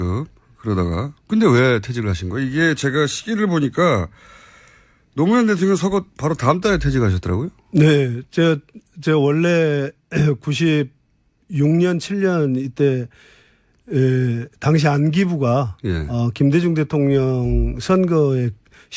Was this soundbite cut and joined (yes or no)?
no